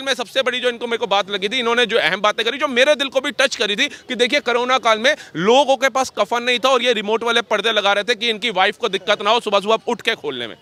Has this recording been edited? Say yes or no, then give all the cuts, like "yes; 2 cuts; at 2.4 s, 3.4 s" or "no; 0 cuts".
no; 0 cuts